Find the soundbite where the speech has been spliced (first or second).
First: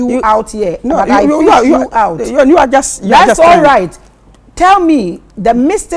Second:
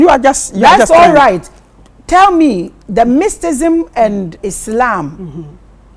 second